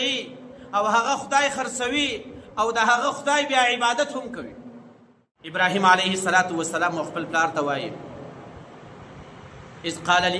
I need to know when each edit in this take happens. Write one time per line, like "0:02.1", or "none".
0:05.4